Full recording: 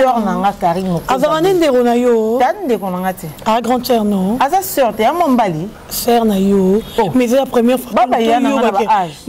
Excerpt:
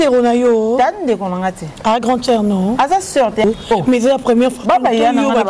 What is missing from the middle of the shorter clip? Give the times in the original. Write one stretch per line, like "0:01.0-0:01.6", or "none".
0:05.1-0:06.7